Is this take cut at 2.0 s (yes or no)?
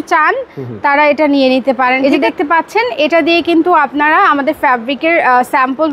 yes